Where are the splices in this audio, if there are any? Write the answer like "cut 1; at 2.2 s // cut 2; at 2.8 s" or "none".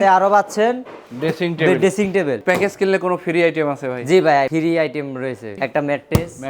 cut 1; at 2.4 s // cut 2; at 4.5 s // cut 3; at 5.6 s